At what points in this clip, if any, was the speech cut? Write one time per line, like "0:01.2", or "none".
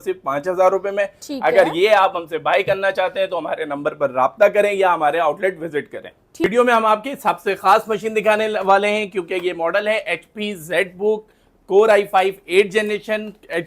none